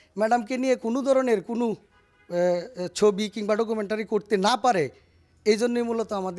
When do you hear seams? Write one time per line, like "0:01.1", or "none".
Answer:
none